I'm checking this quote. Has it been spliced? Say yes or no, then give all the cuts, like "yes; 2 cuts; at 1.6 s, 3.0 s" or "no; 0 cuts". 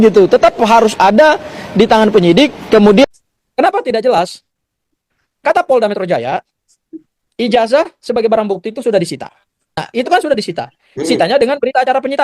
yes; 2 cuts; at 3.0 s, 9.7 s